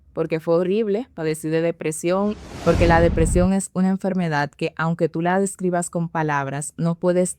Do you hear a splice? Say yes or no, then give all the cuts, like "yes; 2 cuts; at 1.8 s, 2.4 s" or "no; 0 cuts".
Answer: yes; 1 cut; at 2.5 s